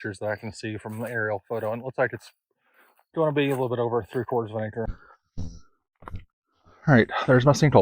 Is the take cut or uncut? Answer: cut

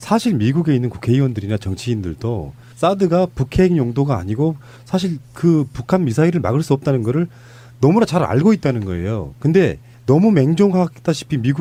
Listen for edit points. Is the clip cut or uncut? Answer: uncut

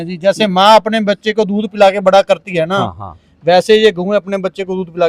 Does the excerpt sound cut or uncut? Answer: uncut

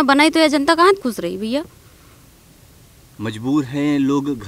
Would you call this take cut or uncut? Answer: uncut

